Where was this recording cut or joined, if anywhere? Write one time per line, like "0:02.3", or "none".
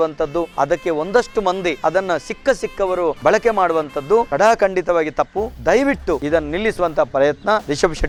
none